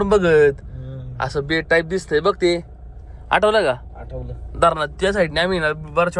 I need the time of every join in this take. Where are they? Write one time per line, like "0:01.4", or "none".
none